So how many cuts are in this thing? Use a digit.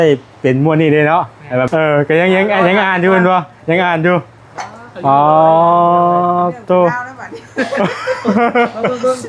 1